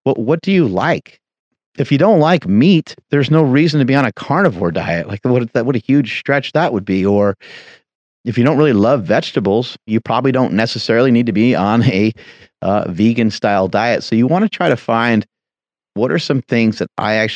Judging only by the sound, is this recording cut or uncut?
cut